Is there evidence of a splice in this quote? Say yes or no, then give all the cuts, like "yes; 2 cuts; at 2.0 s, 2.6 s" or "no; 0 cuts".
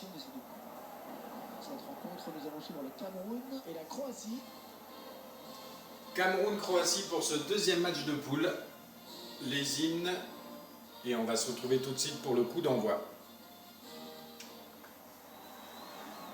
yes; 1 cut; at 3.9 s